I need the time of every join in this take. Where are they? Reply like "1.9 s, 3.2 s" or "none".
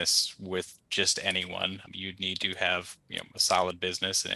none